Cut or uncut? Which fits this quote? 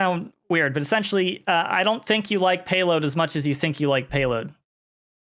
uncut